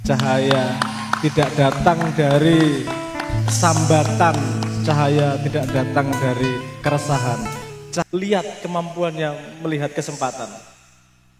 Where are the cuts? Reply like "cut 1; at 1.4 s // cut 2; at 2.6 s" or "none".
cut 1; at 8.1 s